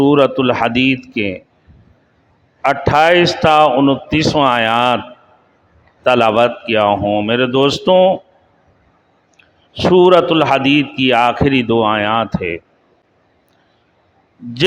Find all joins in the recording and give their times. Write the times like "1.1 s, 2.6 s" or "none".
none